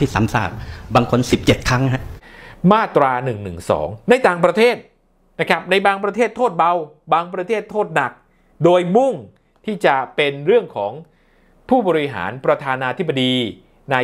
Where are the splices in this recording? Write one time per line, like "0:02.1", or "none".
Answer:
0:02.2